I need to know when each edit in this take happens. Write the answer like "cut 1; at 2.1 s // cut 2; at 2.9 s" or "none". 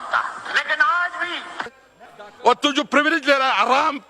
cut 1; at 1.7 s